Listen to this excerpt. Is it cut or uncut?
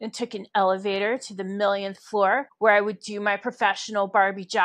cut